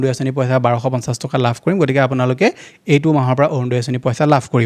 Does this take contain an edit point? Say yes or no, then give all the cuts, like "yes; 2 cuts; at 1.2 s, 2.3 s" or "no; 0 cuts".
no; 0 cuts